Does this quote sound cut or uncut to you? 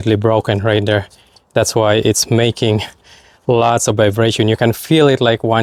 uncut